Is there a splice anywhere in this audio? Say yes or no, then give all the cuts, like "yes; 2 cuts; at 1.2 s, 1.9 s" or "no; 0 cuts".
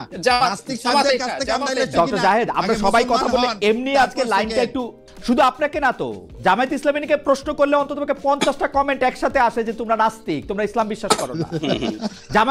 yes; 1 cut; at 5.0 s